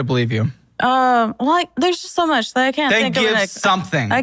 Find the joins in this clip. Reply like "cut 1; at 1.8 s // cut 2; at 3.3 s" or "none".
cut 1; at 1.8 s // cut 2; at 2.9 s